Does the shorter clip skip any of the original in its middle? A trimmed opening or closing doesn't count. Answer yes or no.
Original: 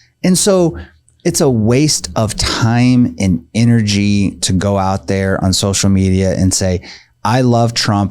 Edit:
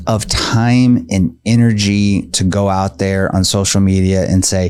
no